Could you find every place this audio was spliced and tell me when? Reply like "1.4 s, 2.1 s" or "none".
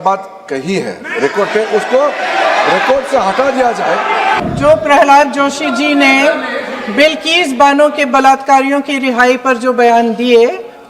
4.4 s